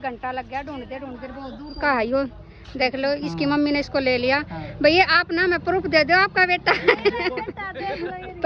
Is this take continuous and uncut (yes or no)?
yes